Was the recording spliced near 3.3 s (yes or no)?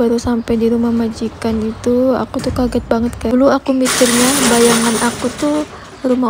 yes